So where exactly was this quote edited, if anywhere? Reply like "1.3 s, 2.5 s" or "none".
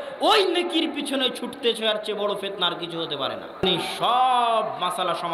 3.6 s